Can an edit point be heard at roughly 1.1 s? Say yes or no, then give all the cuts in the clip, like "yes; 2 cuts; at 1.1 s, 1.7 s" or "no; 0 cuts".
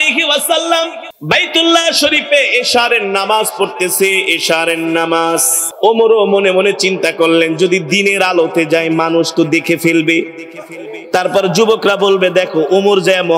yes; 2 cuts; at 1.1 s, 5.7 s